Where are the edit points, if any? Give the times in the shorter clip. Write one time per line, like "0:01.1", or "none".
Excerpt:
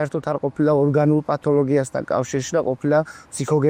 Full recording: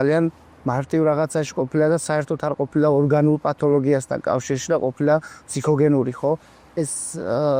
none

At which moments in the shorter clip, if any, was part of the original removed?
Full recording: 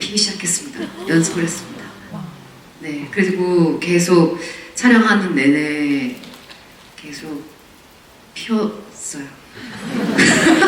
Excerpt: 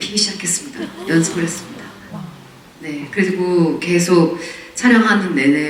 none

